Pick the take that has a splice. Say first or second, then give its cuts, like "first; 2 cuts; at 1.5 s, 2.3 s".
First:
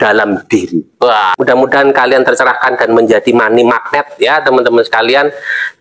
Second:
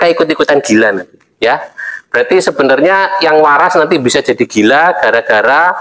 first; 1 cut; at 1.3 s